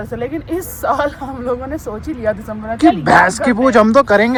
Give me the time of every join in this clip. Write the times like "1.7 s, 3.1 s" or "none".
none